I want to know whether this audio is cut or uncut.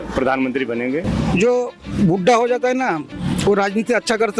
cut